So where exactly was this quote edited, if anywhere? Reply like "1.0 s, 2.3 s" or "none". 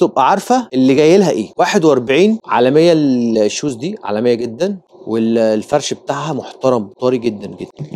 none